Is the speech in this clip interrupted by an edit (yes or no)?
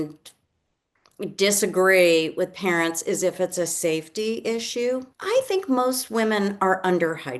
yes